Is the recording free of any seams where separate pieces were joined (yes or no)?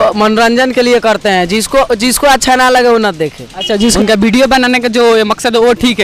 no